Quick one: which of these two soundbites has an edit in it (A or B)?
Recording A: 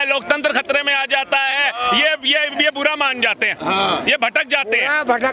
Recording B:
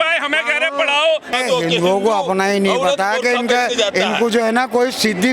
B